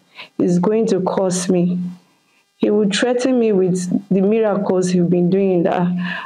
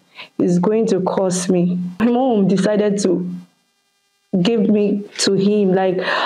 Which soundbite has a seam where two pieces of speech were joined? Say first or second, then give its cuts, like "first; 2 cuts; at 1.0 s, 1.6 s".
second; 1 cut; at 2.0 s